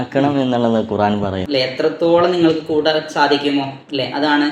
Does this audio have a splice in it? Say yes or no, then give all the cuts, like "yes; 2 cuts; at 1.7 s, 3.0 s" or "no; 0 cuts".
yes; 1 cut; at 1.4 s